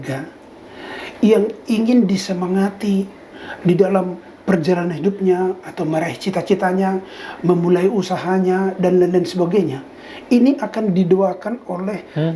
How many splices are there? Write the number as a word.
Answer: zero